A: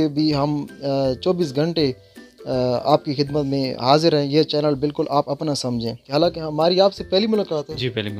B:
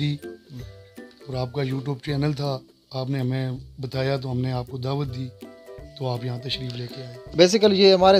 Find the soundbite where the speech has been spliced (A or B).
A